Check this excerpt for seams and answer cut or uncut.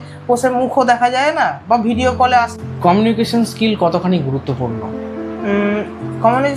cut